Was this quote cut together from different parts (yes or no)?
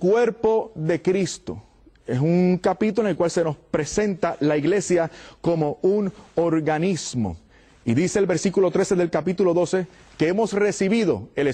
yes